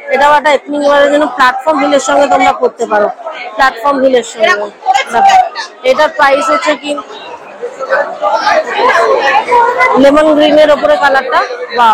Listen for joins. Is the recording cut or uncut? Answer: cut